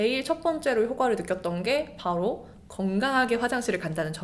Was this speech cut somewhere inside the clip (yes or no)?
no